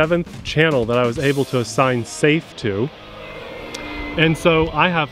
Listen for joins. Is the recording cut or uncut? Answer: uncut